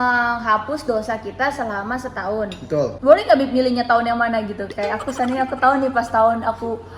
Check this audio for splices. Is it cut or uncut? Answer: cut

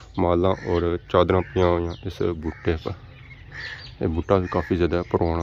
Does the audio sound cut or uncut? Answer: uncut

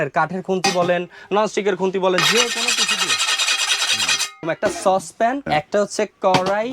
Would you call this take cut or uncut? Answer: cut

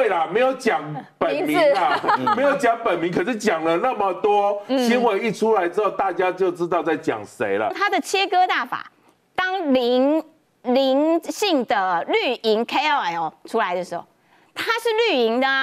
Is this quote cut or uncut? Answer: cut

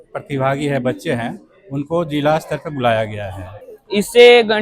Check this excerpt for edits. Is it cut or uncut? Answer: cut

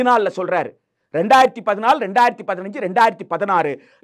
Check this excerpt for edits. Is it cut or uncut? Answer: uncut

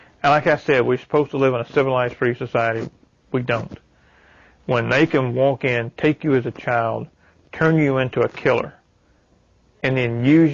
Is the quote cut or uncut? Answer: uncut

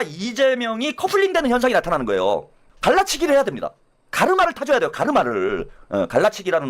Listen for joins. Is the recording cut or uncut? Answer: cut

